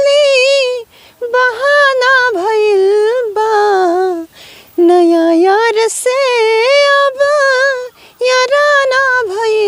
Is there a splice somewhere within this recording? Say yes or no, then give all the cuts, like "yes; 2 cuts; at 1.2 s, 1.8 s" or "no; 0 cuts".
no; 0 cuts